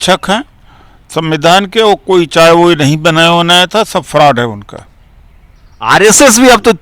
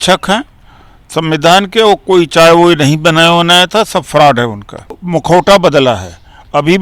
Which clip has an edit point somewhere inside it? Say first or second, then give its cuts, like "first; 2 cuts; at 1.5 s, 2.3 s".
second; 1 cut; at 5.0 s